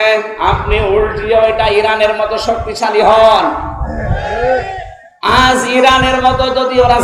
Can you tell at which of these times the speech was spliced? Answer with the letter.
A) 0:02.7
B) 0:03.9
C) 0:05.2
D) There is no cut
D